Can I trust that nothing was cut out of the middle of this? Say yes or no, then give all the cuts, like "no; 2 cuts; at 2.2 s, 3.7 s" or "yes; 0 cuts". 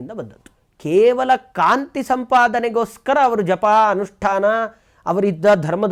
yes; 0 cuts